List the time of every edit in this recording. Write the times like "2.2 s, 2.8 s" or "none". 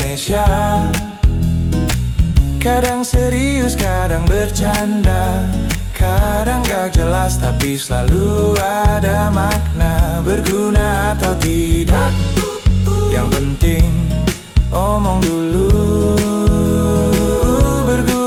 none